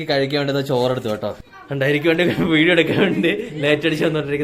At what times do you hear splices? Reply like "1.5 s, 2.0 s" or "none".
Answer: 1.4 s